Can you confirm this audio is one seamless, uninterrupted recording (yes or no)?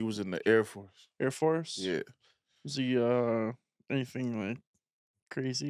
yes